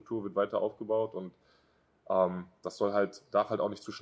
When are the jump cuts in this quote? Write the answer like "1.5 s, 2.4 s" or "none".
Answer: none